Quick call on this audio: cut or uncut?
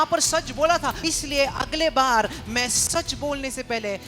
cut